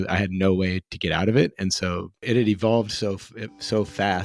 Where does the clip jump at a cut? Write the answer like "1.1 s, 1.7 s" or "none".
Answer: 2.2 s